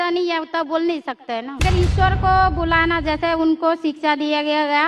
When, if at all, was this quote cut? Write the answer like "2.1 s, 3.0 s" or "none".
1.6 s